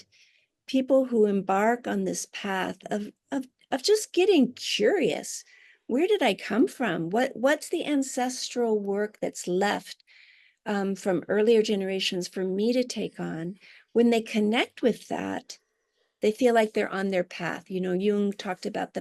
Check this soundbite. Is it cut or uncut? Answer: uncut